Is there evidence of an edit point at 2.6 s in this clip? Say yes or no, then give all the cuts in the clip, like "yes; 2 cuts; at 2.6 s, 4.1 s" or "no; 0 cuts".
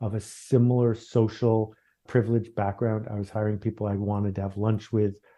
no; 0 cuts